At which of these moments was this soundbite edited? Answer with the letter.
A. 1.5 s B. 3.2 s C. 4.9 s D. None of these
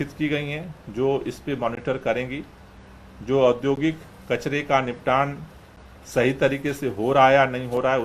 D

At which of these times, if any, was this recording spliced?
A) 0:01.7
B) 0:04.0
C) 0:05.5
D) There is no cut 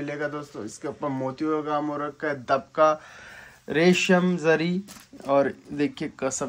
D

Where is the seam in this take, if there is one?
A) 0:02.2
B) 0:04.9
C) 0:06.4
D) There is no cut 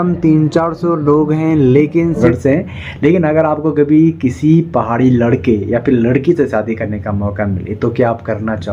A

